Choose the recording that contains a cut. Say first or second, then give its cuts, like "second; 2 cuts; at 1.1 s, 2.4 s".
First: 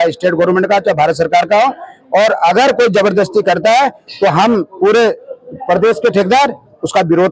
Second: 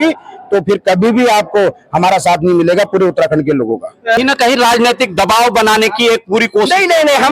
second; 1 cut; at 4.2 s